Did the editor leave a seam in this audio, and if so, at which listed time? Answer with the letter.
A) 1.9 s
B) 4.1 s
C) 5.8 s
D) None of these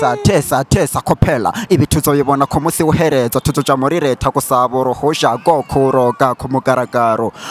D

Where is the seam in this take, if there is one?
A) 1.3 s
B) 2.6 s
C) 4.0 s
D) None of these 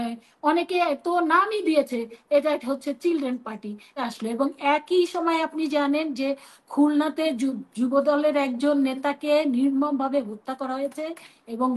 C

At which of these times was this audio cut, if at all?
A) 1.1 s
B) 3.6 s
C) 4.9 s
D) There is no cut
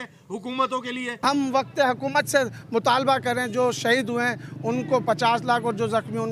A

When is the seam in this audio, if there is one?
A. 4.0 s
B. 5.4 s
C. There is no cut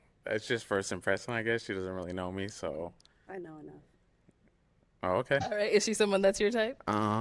B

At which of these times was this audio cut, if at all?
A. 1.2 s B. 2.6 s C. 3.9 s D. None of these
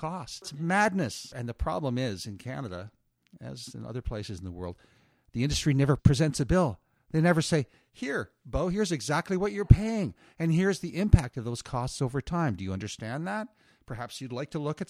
A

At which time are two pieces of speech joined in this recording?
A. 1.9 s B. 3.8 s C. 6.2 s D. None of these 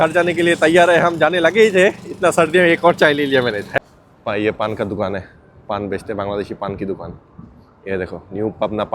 B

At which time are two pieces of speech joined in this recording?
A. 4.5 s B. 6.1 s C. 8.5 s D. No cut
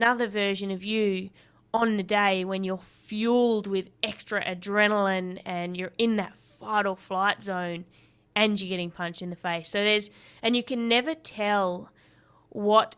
D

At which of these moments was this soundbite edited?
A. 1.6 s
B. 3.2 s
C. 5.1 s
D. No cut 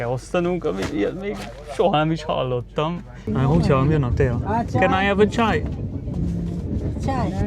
B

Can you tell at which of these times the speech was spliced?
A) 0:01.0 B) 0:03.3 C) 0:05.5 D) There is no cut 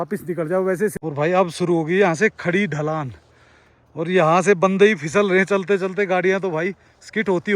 A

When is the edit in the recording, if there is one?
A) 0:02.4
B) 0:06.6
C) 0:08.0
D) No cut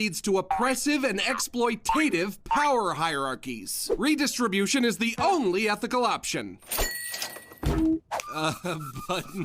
C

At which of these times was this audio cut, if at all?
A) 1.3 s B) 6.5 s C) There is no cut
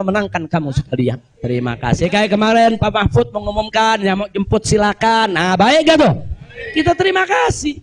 A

